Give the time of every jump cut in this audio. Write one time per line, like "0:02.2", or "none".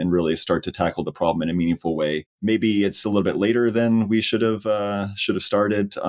0:02.3